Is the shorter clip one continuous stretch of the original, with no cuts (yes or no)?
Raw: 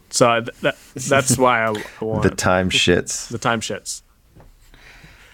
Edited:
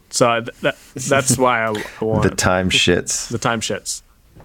yes